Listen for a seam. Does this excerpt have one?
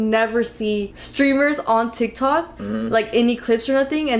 yes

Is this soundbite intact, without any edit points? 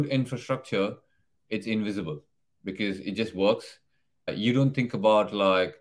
no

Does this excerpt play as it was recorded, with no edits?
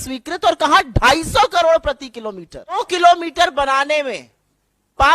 no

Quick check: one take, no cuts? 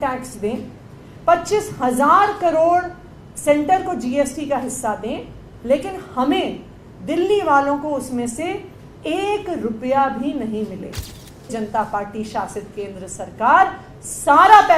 no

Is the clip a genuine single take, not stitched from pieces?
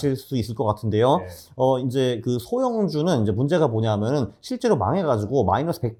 yes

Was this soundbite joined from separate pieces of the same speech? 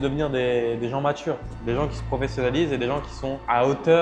no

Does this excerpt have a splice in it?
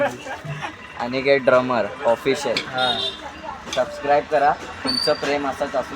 yes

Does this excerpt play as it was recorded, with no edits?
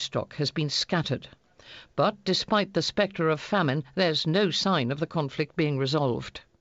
yes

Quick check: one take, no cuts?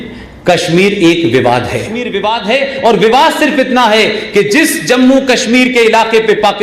no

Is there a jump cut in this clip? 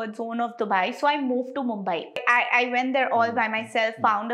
yes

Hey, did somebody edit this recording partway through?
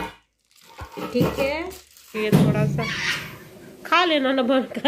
yes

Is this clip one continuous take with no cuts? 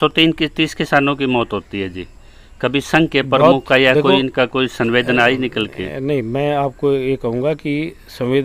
yes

